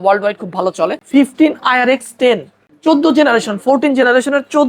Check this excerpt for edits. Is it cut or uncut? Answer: cut